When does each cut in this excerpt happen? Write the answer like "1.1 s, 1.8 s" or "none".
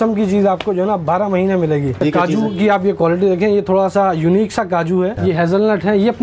2.0 s, 5.2 s